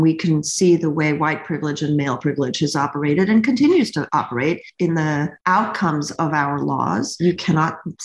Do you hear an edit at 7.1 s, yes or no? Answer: yes